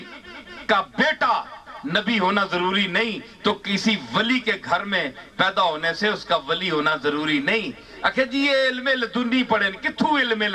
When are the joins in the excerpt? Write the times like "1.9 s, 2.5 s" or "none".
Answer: none